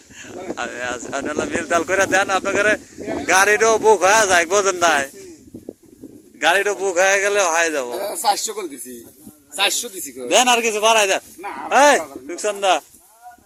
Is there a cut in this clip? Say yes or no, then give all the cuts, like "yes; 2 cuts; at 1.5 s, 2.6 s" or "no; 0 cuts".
no; 0 cuts